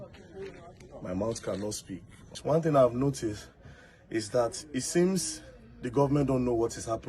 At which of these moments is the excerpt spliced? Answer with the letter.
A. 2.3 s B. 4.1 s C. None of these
A